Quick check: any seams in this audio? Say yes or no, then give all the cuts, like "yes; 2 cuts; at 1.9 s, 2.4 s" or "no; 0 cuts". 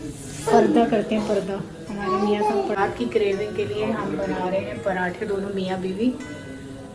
yes; 1 cut; at 2.8 s